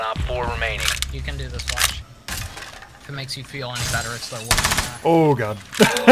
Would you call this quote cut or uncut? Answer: cut